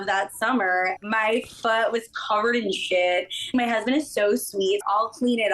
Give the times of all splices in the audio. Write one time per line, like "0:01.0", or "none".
0:00.9
0:03.5
0:04.8